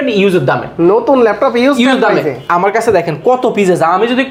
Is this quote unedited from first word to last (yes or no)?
yes